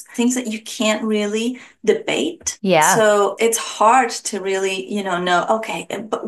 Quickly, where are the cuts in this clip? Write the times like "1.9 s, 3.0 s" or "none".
3.3 s